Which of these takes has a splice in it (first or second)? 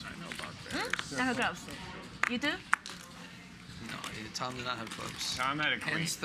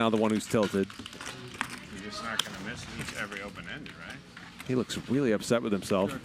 second